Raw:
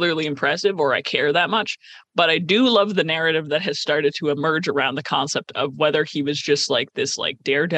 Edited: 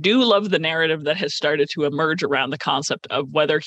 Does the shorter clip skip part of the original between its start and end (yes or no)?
no